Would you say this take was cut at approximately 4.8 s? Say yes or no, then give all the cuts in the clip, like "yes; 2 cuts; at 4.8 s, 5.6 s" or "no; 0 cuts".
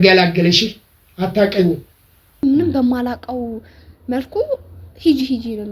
no; 1 cut; at 2.4 s